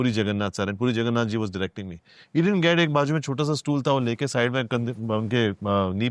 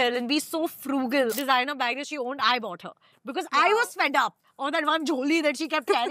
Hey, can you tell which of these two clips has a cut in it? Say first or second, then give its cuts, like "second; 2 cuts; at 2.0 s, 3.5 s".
second; 1 cut; at 1.3 s